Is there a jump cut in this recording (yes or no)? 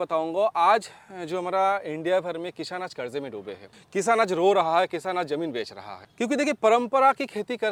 no